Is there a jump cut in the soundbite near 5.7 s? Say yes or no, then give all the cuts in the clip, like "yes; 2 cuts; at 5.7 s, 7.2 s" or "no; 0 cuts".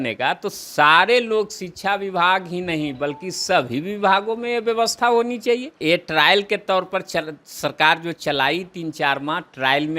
yes; 1 cut; at 5.7 s